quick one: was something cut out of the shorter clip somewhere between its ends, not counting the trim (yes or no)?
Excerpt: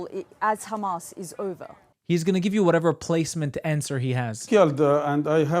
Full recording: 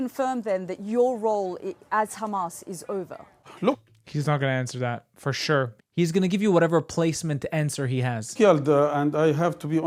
yes